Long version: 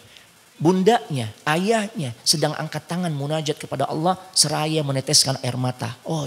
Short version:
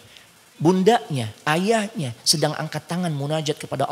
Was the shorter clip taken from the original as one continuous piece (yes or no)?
yes